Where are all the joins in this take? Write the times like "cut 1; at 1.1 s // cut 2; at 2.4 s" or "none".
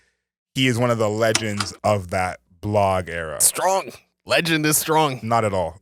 none